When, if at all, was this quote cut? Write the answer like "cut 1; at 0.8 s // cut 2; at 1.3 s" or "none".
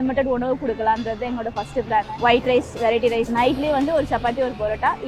cut 1; at 2.1 s // cut 2; at 3.3 s